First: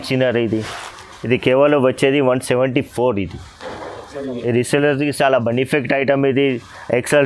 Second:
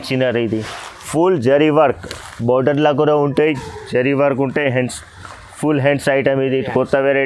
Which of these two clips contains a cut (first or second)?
second